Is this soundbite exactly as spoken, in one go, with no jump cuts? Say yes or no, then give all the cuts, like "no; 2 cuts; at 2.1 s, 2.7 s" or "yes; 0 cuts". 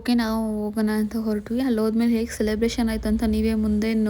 yes; 0 cuts